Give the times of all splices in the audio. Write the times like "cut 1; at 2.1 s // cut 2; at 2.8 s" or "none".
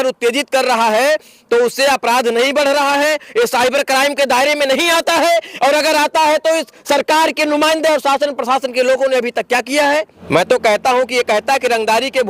cut 1; at 10.2 s